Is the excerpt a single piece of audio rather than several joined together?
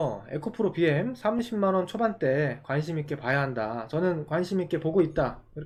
yes; 0 cuts

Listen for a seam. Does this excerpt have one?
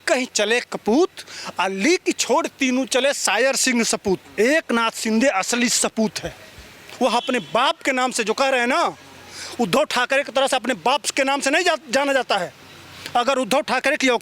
yes; 1 cut; at 4.3 s

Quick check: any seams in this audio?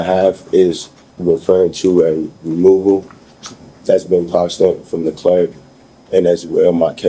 no; 0 cuts

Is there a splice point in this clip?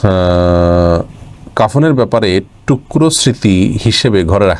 no; 0 cuts

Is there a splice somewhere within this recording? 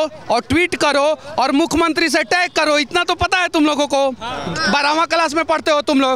no; 0 cuts

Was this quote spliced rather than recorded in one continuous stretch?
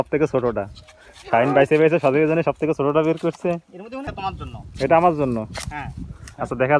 yes; 1 cut; at 4.0 s

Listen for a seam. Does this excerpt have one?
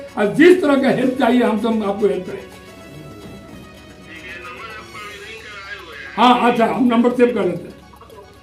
no; 0 cuts

